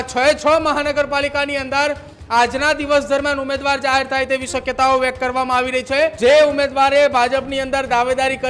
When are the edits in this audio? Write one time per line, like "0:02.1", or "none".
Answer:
0:06.1